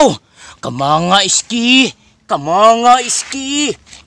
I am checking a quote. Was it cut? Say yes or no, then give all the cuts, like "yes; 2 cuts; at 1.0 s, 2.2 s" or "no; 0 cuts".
no; 0 cuts